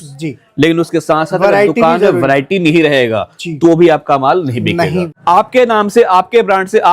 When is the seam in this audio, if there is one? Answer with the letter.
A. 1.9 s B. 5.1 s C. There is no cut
B